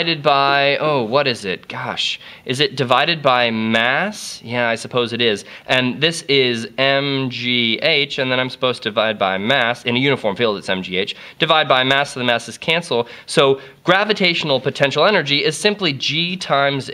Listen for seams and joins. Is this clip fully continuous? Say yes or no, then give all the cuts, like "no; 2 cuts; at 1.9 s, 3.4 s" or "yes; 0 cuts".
no; 1 cut; at 13.5 s